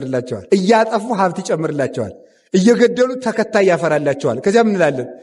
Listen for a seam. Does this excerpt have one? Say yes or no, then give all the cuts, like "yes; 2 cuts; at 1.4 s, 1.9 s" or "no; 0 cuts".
no; 0 cuts